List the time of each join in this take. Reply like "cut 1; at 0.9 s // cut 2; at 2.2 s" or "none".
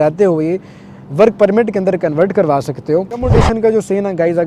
cut 1; at 3.3 s

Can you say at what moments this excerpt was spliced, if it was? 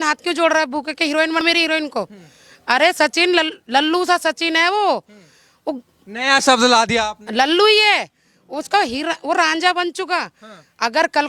cut 1; at 1.4 s

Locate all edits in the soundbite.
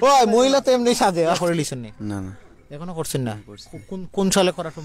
cut 1; at 1.4 s

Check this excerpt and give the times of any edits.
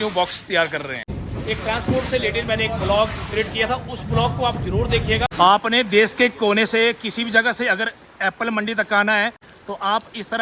cut 1; at 1.2 s // cut 2; at 5.3 s // cut 3; at 9.5 s

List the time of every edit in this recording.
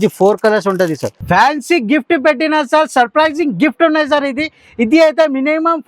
cut 1; at 1.1 s

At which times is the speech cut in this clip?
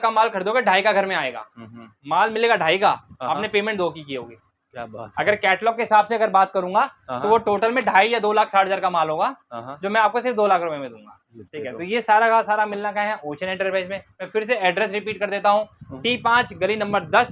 none

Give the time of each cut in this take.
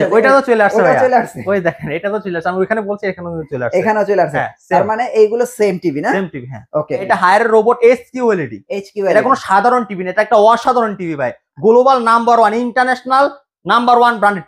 cut 1; at 7.1 s

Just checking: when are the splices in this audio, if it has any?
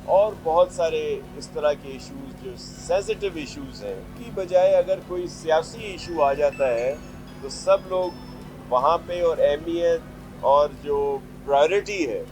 cut 1; at 4.2 s

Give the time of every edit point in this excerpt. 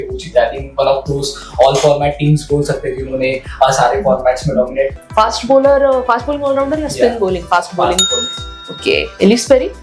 cut 1; at 4.9 s

